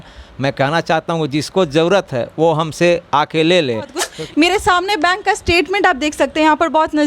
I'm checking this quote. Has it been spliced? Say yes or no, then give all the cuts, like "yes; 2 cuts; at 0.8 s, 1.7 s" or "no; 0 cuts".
yes; 1 cut; at 4.0 s